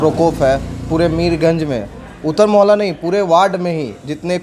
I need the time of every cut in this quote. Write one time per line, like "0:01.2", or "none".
none